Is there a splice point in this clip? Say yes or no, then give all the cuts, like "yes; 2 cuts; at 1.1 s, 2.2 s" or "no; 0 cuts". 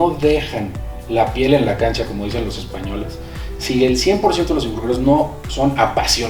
no; 0 cuts